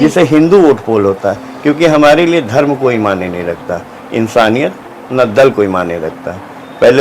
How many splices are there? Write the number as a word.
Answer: zero